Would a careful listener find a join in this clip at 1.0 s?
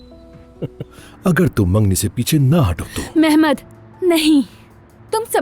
yes; 1 cut; at 1.0 s

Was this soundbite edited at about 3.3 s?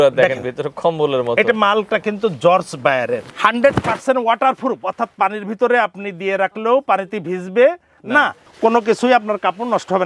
yes; 2 cuts; at 3.3 s, 8.4 s

